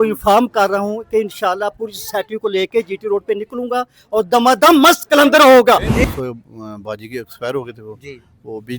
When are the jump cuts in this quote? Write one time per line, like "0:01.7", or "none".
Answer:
0:06.0